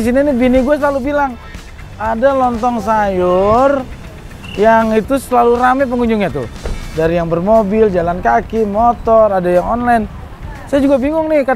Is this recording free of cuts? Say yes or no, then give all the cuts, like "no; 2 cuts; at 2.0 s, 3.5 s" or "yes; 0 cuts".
yes; 0 cuts